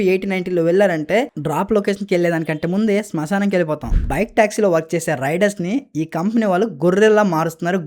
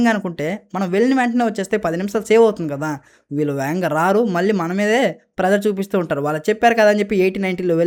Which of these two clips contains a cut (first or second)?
first